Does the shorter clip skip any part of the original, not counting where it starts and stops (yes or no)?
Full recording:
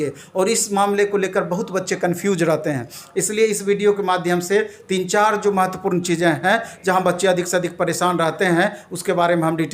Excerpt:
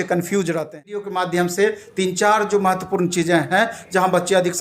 yes